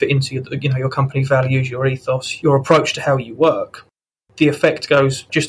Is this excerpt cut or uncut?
cut